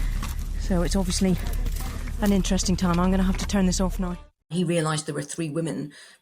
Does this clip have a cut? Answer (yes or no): yes